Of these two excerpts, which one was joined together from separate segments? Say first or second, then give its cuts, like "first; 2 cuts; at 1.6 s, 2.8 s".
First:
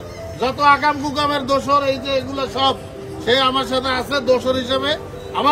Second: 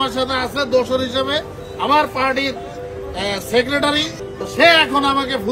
second; 1 cut; at 4.2 s